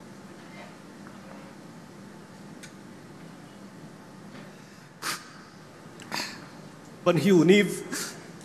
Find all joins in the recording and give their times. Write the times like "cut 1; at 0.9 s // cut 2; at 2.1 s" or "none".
cut 1; at 4.9 s